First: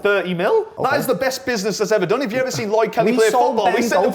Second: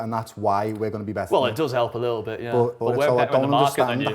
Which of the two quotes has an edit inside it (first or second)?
second